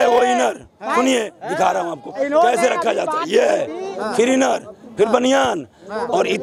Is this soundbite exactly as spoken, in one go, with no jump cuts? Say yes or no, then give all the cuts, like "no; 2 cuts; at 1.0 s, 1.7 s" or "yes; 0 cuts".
yes; 0 cuts